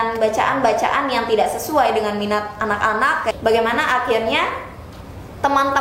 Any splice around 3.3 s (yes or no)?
yes